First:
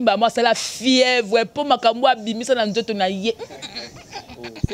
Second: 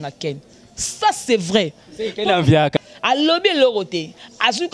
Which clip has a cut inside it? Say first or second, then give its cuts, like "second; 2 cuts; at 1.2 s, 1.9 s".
second; 1 cut; at 2.7 s